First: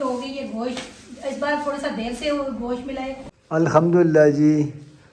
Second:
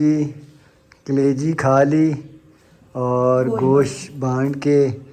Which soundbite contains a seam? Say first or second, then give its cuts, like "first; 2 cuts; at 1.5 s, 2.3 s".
first; 1 cut; at 3.3 s